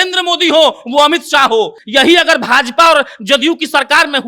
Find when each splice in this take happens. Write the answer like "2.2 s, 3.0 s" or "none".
1.8 s